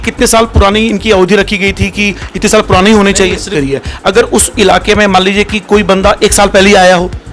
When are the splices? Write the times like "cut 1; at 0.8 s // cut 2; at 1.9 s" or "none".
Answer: cut 1; at 3.5 s